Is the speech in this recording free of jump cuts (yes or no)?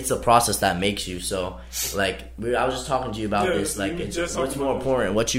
yes